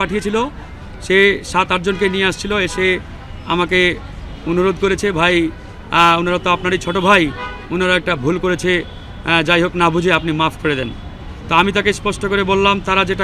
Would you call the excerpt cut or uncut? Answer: uncut